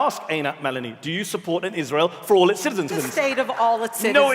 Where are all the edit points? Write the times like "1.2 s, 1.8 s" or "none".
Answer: 3.0 s